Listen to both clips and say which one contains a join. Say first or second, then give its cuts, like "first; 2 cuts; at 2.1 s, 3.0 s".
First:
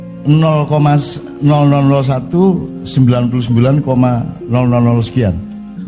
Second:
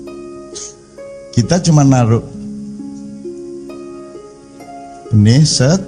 second; 3 cuts; at 0.8 s, 2.5 s, 4.4 s